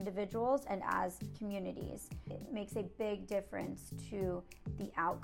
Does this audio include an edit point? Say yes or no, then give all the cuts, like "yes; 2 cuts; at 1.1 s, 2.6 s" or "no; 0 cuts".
yes; 2 cuts; at 1.2 s, 2.3 s